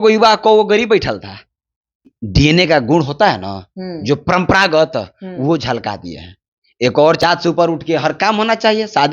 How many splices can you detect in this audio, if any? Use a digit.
2